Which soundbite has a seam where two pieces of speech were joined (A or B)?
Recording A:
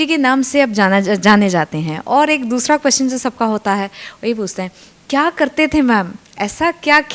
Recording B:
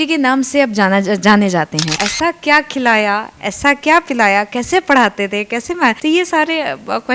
B